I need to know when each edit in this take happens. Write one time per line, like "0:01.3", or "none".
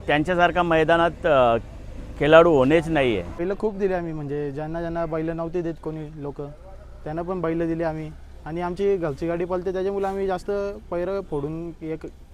0:03.4

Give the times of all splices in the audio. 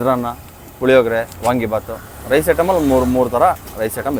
none

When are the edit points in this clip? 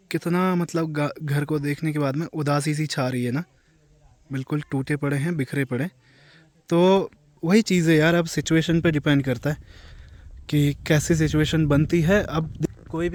none

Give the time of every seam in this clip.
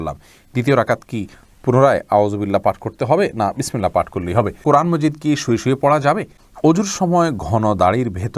0:04.6
0:06.4

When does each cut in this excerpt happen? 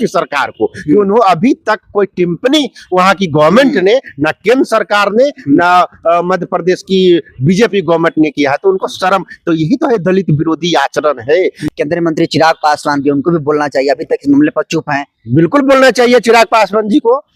0:11.6

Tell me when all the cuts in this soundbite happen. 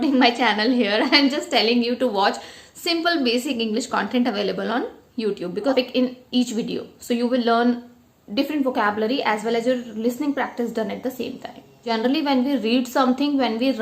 0:05.7
0:11.9

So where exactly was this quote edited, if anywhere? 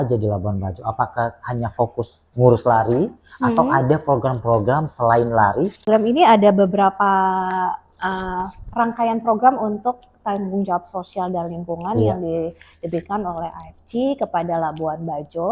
0:05.9

